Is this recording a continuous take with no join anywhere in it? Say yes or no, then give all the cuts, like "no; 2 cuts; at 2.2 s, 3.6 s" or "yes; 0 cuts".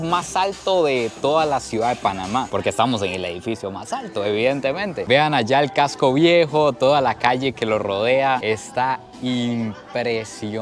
yes; 0 cuts